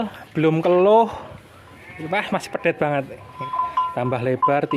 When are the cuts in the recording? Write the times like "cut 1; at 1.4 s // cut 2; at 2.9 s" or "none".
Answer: cut 1; at 3.3 s